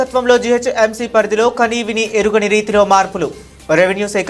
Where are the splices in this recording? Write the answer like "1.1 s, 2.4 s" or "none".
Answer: none